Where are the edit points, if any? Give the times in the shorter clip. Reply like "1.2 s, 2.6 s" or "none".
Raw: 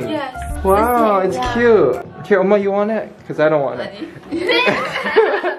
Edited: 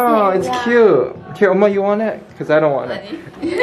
none